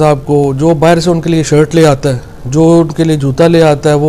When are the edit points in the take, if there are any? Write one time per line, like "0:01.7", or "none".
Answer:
none